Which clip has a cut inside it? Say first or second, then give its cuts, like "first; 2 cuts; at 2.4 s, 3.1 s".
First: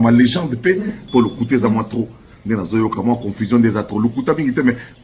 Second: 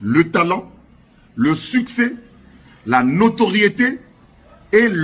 first; 1 cut; at 1.0 s